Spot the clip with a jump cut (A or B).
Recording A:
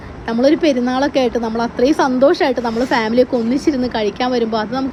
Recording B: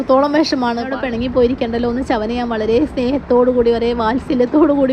B